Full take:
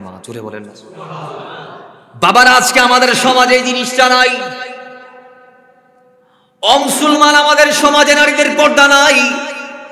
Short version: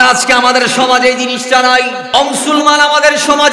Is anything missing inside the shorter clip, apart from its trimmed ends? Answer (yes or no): yes